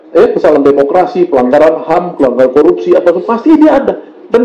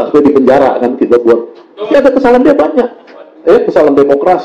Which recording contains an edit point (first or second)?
second